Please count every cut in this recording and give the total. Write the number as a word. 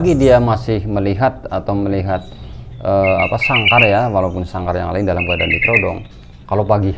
zero